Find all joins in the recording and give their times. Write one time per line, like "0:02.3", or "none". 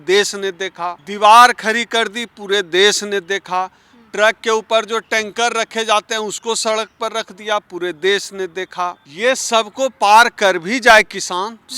0:01.0
0:09.0